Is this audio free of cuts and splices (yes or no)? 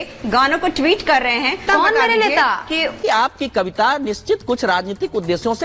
no